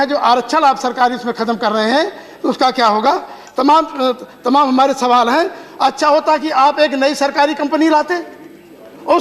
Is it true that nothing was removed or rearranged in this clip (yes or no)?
yes